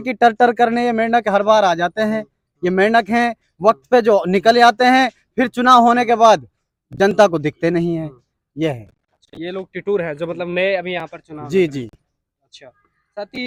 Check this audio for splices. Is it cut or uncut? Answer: uncut